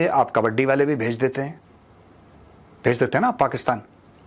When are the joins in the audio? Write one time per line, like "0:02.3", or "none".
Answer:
none